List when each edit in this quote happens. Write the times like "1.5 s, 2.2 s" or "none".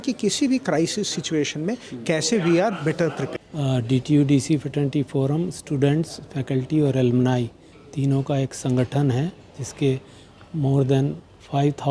none